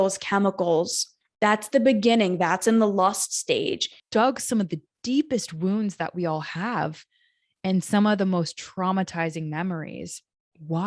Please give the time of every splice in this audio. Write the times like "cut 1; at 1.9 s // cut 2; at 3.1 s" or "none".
cut 1; at 3.9 s